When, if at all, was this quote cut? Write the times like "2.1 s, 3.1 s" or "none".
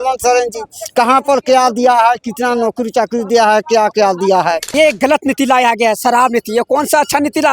4.7 s